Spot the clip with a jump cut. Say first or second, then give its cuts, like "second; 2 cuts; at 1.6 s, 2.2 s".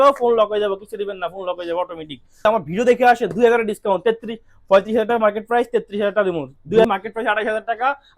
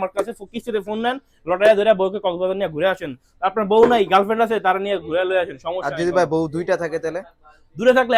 first; 2 cuts; at 2.5 s, 6.8 s